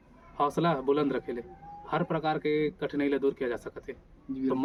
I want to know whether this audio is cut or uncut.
uncut